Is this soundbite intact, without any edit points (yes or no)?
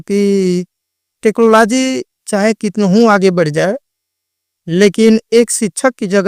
yes